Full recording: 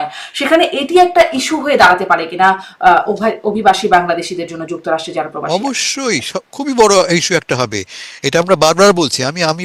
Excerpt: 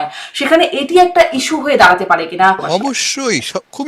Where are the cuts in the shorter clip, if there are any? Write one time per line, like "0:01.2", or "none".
0:02.6